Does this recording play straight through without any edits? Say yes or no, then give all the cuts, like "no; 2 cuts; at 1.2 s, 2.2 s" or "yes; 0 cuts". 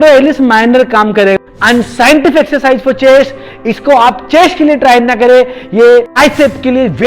no; 3 cuts; at 1.4 s, 3.5 s, 6.2 s